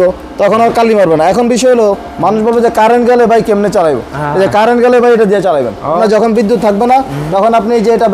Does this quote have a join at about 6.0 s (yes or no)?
yes